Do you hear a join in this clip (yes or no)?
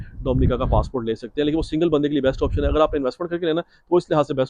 no